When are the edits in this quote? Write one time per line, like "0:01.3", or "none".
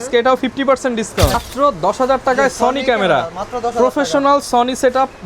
0:01.3